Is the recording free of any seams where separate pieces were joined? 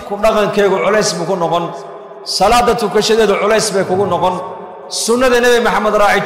yes; 0 cuts

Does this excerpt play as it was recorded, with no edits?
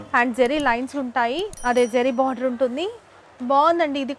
yes; 0 cuts

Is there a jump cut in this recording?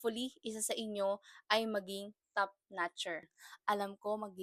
yes; 1 cut; at 3.4 s

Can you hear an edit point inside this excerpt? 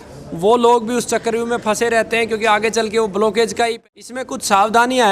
yes; 1 cut; at 3.8 s

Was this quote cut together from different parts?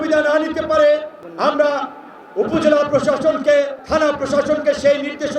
yes; 2 cuts; at 1.2 s, 3.8 s

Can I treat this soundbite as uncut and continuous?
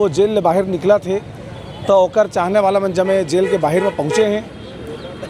yes; 0 cuts

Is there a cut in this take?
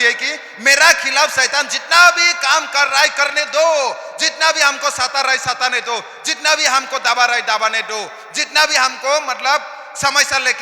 no; 0 cuts

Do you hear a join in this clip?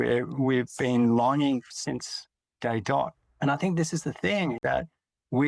yes; 2 cuts; at 3.2 s, 4.6 s

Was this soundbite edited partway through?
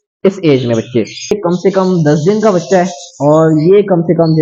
yes; 1 cut; at 1.4 s

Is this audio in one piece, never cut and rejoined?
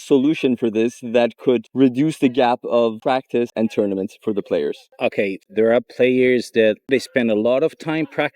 no; 4 cuts; at 1.7 s, 3.3 s, 5.4 s, 6.9 s

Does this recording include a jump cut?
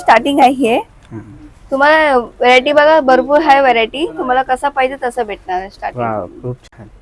no; 0 cuts

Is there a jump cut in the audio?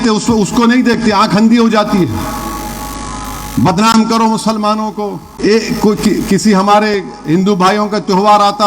yes; 1 cut; at 5.2 s

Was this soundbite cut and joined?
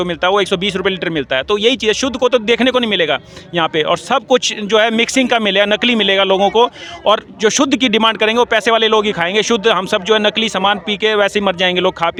no; 0 cuts

